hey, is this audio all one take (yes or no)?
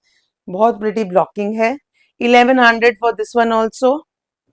yes